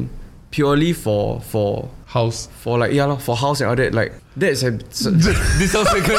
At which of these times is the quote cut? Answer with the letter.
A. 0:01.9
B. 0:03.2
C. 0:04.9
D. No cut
A